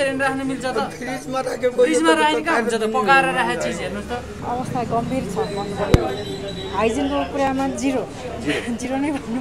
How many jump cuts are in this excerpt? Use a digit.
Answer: 1